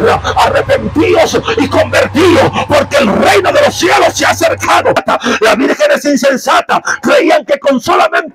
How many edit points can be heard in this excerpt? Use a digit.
1